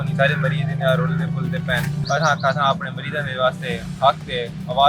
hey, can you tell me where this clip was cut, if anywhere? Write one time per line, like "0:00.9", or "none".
0:02.0